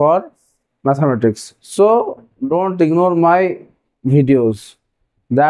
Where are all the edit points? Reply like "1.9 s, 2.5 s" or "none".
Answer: none